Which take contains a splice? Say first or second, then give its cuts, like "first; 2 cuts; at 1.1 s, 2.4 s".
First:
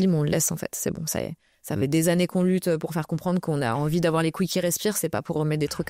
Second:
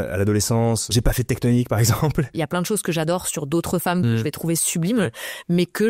second; 2 cuts; at 0.9 s, 2.3 s